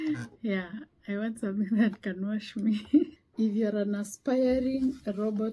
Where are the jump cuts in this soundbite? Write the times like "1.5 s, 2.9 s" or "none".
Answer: 3.2 s